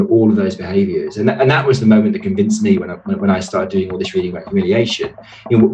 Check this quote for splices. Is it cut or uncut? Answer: uncut